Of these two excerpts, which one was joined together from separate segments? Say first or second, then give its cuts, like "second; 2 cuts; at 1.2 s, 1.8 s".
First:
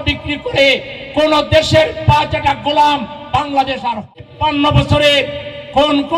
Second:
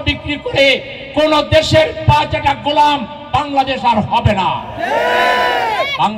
first; 1 cut; at 4.0 s